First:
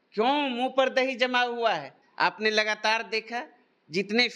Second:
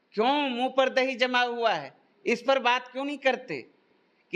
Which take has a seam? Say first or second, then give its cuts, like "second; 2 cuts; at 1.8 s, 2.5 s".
first; 1 cut; at 2.1 s